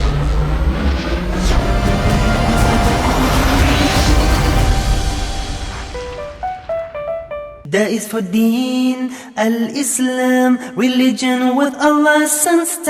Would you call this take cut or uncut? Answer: cut